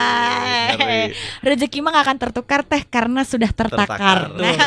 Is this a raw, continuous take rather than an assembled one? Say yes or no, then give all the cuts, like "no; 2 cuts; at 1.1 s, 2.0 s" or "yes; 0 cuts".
yes; 0 cuts